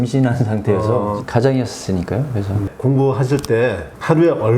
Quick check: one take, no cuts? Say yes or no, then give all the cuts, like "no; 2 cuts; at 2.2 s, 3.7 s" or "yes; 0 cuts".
no; 2 cuts; at 1.2 s, 2.6 s